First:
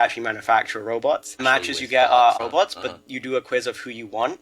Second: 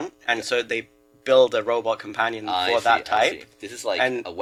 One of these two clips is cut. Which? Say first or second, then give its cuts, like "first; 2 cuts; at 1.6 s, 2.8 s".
first; 2 cuts; at 1.4 s, 2.3 s